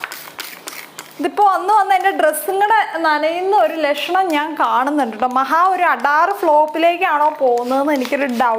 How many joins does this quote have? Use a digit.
0